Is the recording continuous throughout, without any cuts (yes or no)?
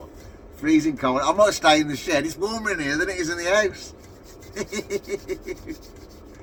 yes